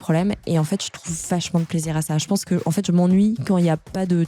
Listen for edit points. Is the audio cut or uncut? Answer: uncut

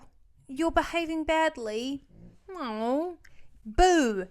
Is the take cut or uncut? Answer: uncut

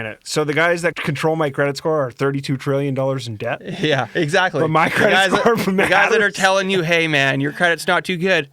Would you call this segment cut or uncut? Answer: cut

